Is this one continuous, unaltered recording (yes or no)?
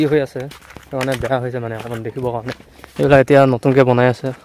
yes